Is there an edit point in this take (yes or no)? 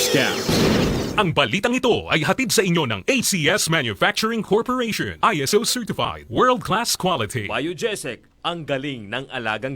yes